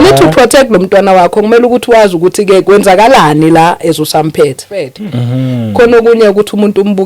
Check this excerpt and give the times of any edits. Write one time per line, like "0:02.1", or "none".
0:05.0